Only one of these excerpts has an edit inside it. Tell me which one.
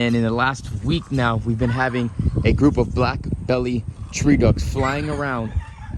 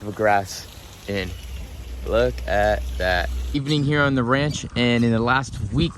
second; 1 cut; at 3.5 s

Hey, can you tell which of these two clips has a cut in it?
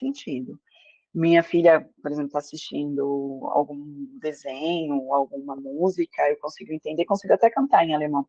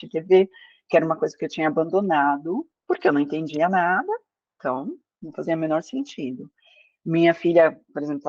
second; 1 cut; at 2.7 s

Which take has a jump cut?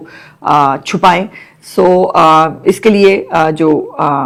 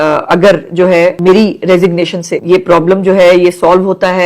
second; 2 cuts; at 1.2 s, 2.3 s

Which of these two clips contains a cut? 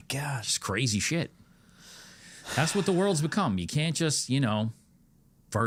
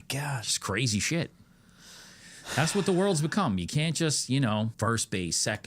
second; 1 cut; at 4.7 s

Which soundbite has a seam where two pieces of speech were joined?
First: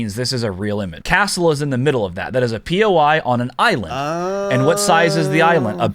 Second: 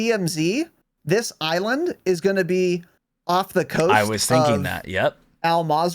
first; 1 cut; at 1.0 s

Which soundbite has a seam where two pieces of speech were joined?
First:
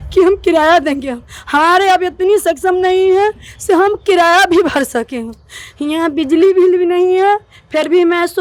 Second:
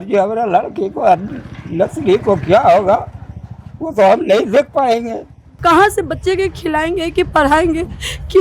second; 1 cut; at 5.6 s

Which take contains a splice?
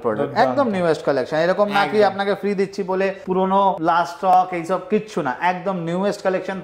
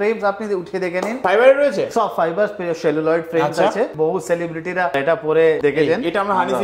second; 2 cuts; at 1.2 s, 3.9 s

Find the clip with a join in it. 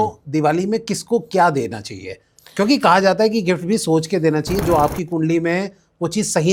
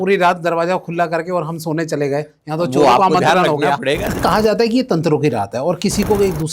second; 1 cut; at 4.2 s

